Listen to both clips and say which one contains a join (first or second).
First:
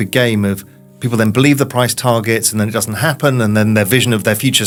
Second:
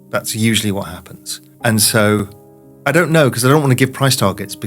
second